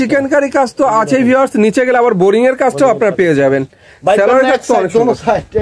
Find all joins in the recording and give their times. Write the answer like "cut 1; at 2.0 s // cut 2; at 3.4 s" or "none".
none